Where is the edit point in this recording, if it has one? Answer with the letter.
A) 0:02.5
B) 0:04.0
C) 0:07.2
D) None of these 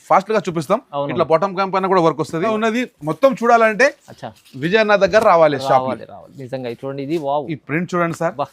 A